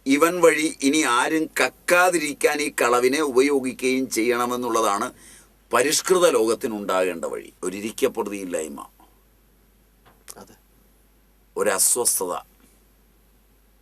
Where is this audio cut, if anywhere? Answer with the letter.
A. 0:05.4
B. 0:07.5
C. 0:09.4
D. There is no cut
B